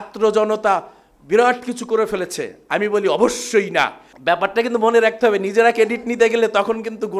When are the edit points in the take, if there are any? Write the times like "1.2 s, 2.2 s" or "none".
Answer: 4.1 s